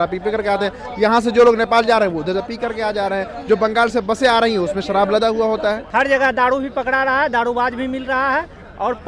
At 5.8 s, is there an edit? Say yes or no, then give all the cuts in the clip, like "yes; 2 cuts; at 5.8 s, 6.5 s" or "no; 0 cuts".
yes; 1 cut; at 5.8 s